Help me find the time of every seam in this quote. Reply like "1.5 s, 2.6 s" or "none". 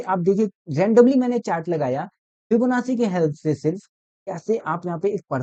none